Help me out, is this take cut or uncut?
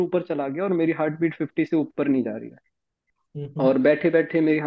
uncut